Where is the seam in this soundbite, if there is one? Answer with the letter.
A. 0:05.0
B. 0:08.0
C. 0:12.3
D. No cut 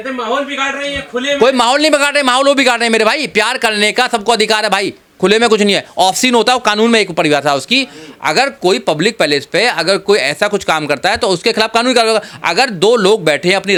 D